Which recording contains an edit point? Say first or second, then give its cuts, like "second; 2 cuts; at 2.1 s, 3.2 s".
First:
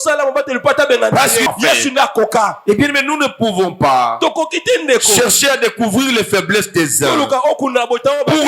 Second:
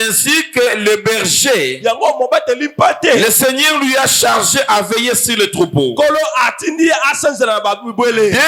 first; 1 cut; at 1.5 s